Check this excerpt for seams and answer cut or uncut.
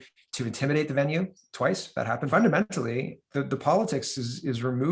cut